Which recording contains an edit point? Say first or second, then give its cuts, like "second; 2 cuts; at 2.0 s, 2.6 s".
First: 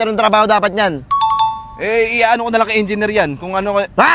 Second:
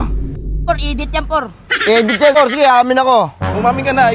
second; 1 cut; at 2.4 s